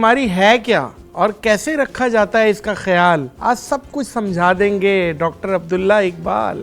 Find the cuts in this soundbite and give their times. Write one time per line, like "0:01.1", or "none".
0:03.3